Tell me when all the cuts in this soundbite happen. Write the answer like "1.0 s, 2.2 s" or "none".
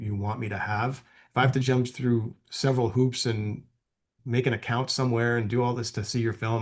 4.1 s